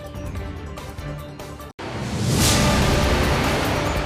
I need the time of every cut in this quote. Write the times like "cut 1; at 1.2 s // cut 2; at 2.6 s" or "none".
none